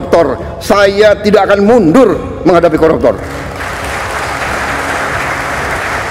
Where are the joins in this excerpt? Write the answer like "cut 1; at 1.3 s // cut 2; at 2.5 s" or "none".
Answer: none